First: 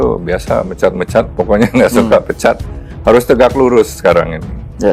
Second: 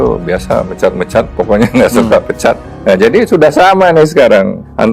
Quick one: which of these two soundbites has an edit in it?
second; 1 cut; at 2.7 s

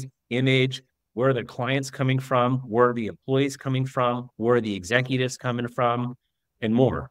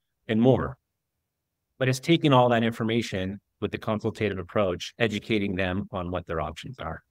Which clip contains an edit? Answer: second; 2 cuts; at 3.4 s, 4.9 s

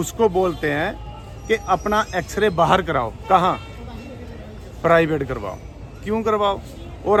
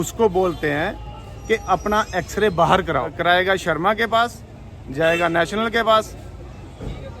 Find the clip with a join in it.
second; 1 cut; at 3.1 s

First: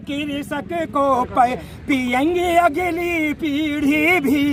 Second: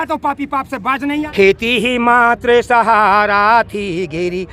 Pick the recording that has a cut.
second; 1 cut; at 1.3 s

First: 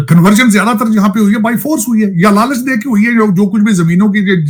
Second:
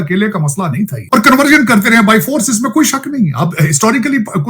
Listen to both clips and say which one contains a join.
second; 1 cut; at 1.0 s

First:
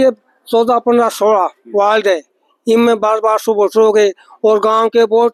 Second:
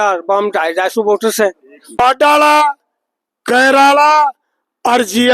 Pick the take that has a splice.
second; 1 cut; at 1.9 s

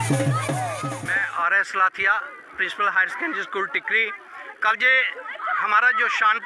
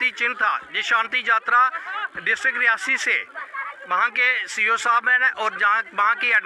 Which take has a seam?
first; 1 cut; at 0.9 s

